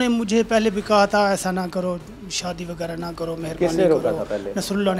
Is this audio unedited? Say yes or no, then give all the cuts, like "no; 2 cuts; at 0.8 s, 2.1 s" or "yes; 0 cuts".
yes; 0 cuts